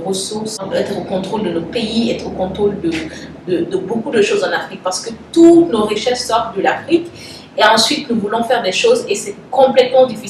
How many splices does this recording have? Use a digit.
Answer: 0